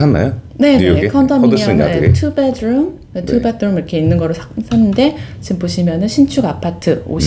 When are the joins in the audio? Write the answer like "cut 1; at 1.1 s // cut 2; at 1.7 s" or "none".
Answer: none